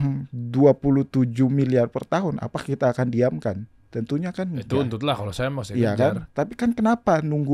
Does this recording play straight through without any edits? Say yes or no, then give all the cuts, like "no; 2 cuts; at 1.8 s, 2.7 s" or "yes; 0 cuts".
yes; 0 cuts